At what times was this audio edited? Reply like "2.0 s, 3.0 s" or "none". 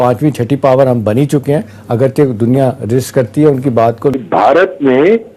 4.2 s